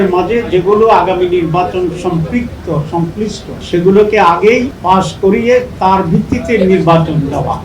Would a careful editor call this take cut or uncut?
cut